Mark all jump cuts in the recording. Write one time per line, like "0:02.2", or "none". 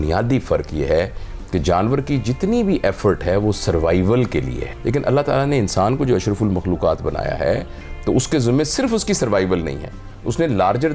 0:04.6